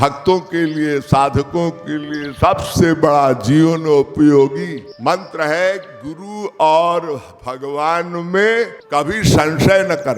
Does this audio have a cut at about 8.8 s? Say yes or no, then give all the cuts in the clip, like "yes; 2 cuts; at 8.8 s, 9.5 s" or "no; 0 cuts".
yes; 2 cuts; at 4.8 s, 8.8 s